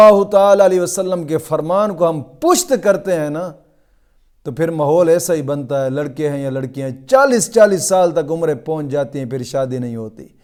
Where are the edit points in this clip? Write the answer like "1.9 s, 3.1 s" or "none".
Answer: none